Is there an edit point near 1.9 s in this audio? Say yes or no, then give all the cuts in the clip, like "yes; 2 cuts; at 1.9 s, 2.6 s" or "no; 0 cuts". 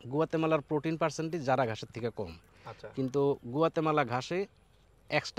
no; 0 cuts